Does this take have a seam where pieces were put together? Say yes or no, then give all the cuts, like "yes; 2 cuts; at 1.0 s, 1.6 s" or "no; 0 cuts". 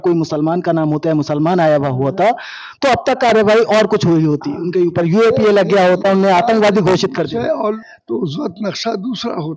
yes; 1 cut; at 7.8 s